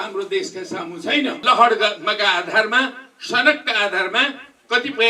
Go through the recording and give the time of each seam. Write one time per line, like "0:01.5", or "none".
0:01.4